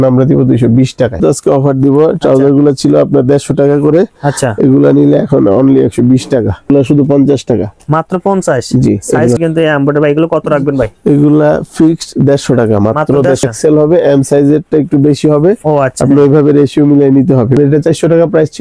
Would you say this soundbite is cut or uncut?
cut